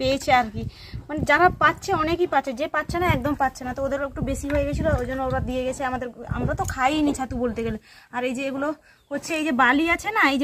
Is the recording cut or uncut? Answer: uncut